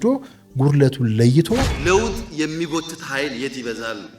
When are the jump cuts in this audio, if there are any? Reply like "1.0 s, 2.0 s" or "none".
1.7 s